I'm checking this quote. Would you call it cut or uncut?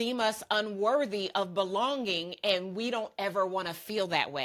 uncut